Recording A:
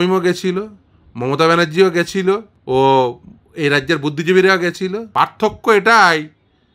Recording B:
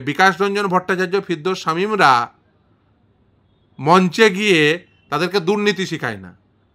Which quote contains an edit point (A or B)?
A